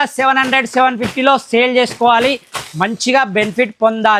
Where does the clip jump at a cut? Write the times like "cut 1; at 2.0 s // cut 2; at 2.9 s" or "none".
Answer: none